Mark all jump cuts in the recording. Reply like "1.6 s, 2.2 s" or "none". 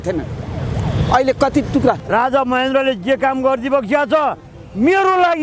2.0 s